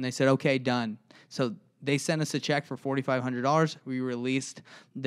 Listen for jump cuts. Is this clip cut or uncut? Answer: uncut